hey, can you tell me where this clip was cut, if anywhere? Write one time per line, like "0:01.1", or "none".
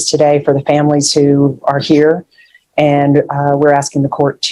none